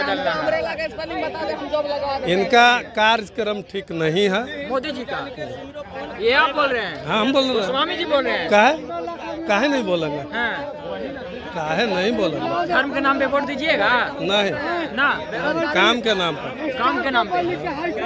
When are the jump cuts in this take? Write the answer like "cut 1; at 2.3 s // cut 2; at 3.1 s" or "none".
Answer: none